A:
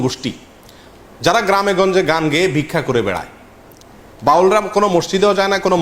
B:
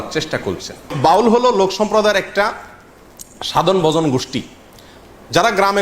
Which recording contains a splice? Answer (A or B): B